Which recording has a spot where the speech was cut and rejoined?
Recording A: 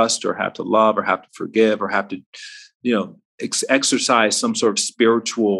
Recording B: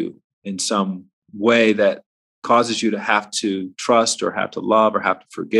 B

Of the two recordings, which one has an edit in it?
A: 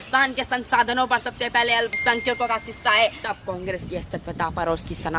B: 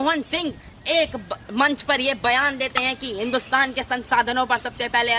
A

